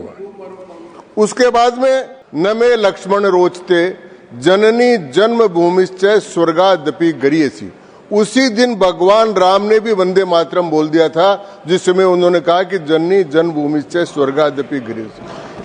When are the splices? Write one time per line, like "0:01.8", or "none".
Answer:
0:02.2

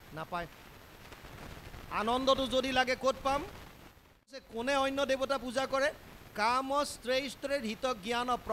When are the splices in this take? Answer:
0:04.5

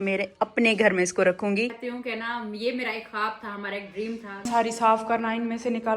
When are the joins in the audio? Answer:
0:01.7
0:04.5

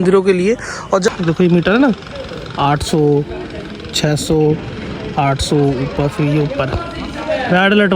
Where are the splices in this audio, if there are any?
0:01.1

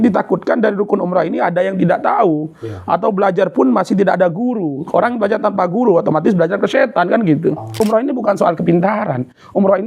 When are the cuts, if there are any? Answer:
0:07.8

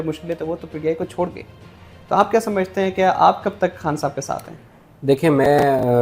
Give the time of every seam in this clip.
none

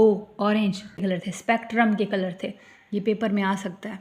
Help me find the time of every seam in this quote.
0:00.9

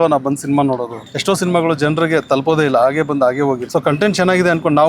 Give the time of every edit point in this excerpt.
0:01.0
0:03.6

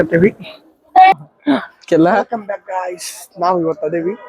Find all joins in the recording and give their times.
0:01.2

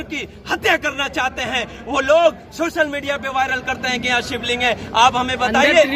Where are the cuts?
none

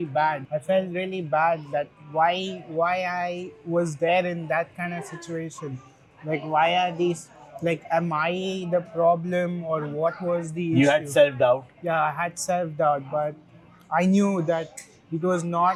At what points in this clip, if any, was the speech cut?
none

